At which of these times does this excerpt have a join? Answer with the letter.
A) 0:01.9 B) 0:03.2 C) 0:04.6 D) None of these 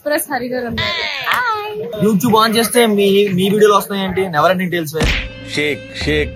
A